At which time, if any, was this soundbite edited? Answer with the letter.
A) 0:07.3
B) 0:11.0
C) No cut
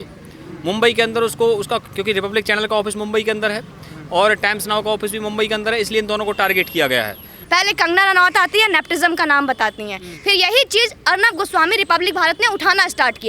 A